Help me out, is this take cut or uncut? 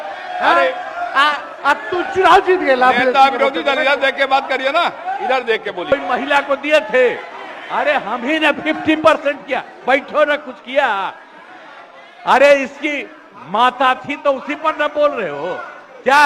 cut